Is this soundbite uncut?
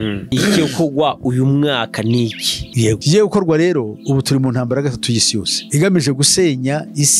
yes; 0 cuts

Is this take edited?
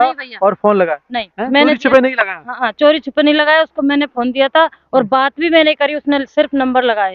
no; 0 cuts

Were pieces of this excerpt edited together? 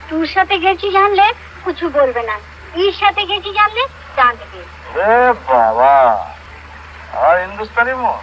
no; 0 cuts

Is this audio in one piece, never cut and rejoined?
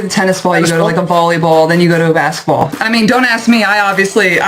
no; 1 cut; at 2.8 s

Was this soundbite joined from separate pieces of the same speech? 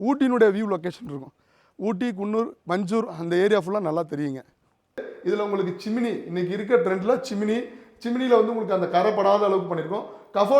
yes; 1 cut; at 5.1 s

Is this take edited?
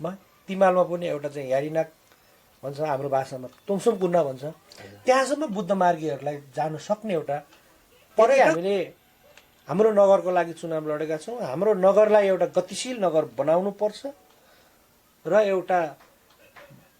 yes; 1 cut; at 8.4 s

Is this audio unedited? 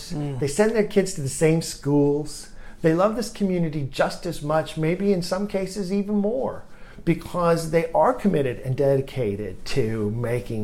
yes; 0 cuts

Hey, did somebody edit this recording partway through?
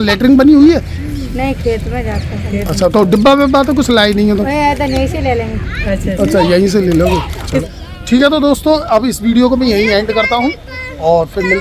no; 0 cuts

